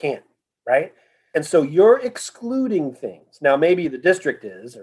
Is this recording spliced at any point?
yes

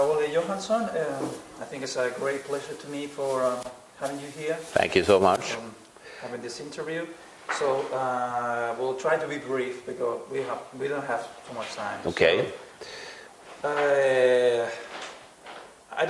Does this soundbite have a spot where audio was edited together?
yes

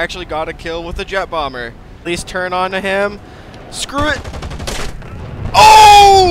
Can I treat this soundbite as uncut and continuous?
no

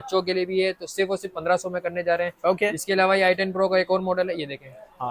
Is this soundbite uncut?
yes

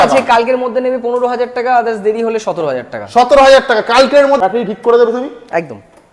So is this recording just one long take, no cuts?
no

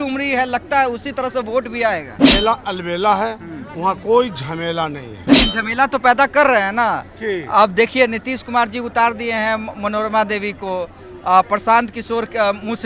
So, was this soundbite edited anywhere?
yes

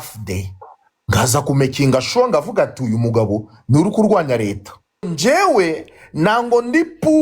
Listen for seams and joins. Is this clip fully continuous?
no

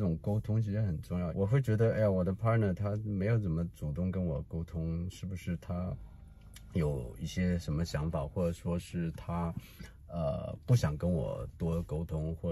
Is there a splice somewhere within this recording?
yes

